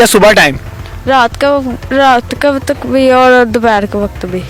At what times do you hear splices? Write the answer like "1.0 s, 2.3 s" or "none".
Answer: none